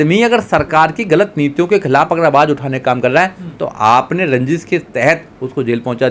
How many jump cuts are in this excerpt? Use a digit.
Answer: 0